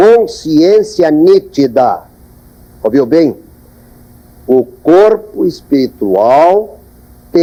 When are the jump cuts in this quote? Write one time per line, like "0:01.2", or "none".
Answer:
none